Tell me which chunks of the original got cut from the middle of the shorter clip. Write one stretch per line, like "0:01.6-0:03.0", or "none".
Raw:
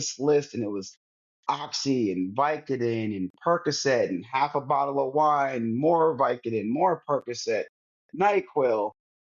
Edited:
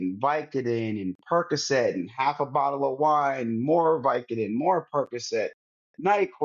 none